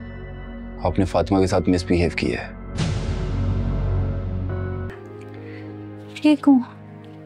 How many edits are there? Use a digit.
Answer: 1